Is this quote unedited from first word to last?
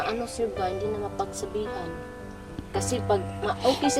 yes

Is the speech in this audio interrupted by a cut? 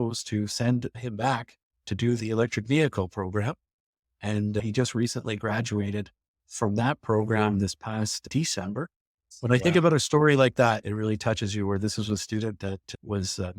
yes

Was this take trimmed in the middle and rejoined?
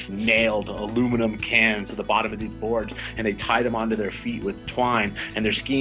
yes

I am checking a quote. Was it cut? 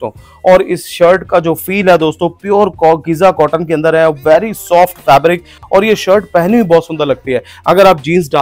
no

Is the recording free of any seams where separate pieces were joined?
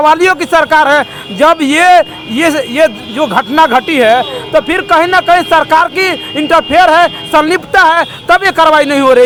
yes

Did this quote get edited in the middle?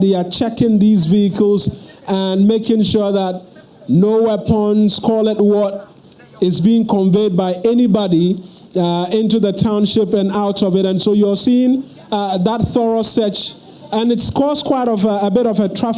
no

